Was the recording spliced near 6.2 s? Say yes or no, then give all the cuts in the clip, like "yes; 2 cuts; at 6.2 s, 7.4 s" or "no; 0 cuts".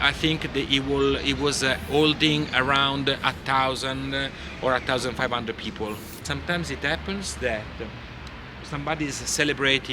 yes; 1 cut; at 6.2 s